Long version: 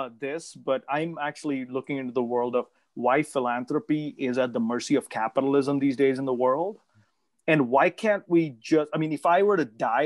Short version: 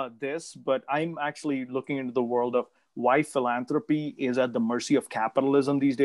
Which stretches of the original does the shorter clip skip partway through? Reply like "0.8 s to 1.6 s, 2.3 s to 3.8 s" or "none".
none